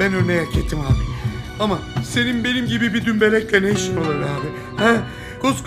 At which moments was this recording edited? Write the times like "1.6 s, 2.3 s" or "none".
none